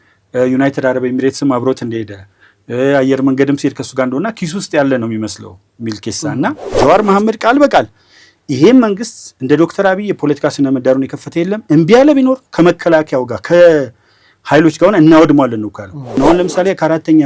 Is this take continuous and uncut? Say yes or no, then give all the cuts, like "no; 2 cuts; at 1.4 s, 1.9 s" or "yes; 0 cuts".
no; 2 cuts; at 6.6 s, 16.1 s